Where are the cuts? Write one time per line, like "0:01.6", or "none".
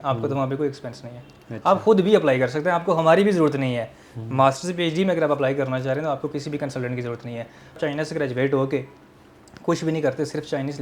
0:07.8